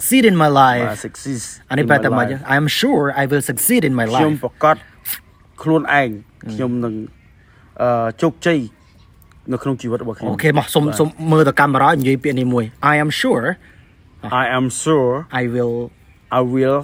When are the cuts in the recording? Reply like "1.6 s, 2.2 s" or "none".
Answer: none